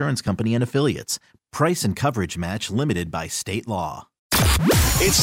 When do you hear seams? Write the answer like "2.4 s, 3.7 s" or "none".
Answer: 4.2 s